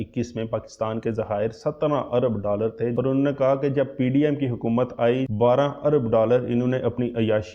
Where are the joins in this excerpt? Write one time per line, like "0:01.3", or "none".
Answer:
0:02.9
0:05.3